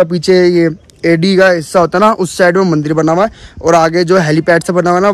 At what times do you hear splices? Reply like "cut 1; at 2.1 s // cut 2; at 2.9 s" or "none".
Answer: none